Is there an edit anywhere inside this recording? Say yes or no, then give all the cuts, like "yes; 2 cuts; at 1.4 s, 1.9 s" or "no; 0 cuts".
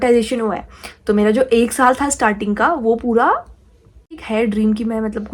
yes; 1 cut; at 4.2 s